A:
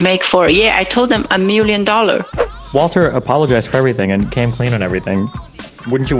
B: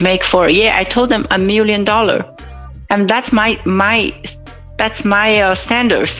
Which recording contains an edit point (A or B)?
A